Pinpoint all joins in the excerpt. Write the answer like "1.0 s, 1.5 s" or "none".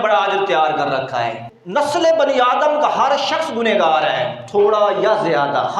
1.5 s